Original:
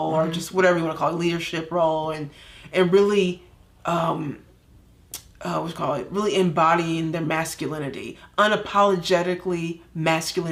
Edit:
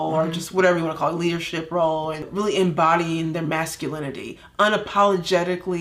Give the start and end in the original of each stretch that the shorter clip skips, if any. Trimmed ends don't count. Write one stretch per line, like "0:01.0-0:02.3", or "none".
0:02.3-0:06.1